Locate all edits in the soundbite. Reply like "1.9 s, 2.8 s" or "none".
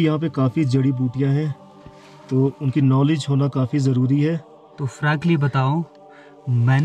none

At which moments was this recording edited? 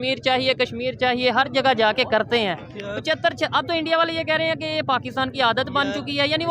none

